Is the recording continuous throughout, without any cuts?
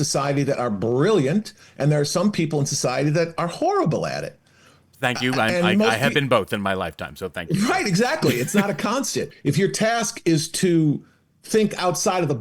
no; 1 cut; at 9.3 s

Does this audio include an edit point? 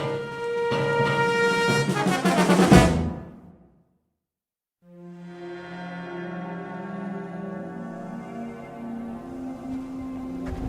yes; 1 cut; at 2.7 s

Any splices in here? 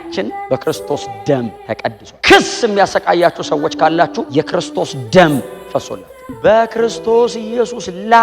yes; 1 cut; at 5.9 s

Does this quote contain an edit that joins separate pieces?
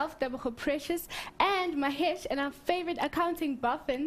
no; 0 cuts

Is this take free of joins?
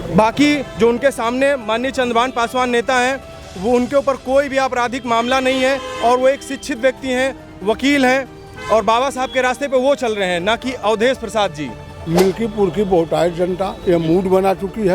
no; 1 cut; at 12.1 s

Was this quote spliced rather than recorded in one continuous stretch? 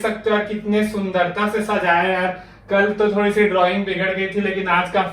no; 0 cuts

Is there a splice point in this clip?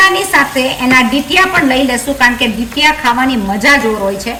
no; 0 cuts

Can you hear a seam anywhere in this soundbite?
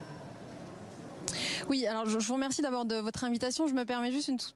yes; 1 cut; at 2.8 s

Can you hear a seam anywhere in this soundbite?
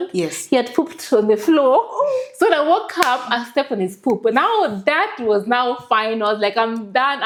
no; 0 cuts

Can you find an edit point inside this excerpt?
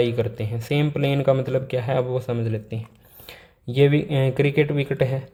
no; 0 cuts

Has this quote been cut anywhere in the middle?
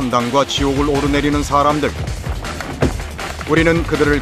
yes; 1 cut; at 1.5 s

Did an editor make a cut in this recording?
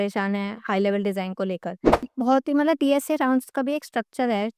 yes; 1 cut; at 2.0 s

